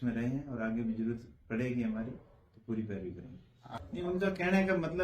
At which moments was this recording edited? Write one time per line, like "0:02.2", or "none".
0:03.5